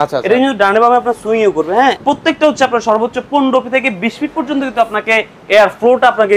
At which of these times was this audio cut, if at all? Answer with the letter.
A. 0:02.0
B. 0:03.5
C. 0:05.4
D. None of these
A